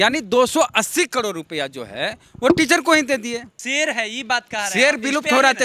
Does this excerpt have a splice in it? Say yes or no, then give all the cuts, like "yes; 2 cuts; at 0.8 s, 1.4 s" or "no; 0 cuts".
yes; 1 cut; at 3.5 s